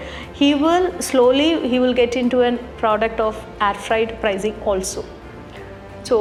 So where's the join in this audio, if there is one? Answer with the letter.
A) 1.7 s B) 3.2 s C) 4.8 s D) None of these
D